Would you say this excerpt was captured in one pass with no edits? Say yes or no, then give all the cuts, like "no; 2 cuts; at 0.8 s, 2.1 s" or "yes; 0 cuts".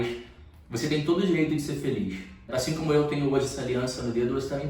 no; 1 cut; at 2.5 s